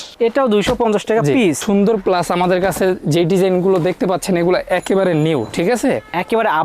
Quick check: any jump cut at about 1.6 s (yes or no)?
yes